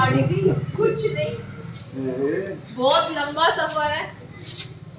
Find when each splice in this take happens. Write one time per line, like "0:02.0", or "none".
none